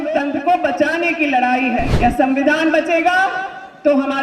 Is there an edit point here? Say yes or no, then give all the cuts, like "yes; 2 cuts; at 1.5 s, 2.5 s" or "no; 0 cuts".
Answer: yes; 1 cut; at 1.9 s